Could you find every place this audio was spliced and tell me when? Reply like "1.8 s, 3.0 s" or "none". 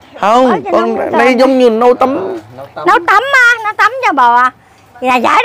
none